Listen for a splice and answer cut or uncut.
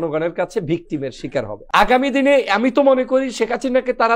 cut